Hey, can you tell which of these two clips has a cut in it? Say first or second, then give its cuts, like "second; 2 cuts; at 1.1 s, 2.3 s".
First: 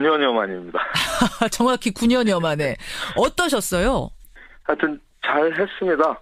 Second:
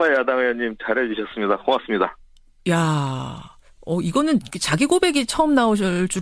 second; 1 cut; at 4.8 s